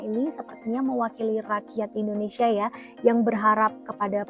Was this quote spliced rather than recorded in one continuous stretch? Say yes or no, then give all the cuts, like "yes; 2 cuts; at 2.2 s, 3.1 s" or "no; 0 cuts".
no; 0 cuts